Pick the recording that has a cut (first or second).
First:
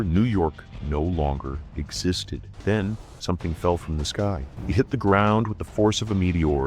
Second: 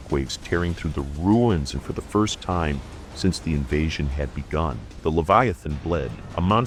first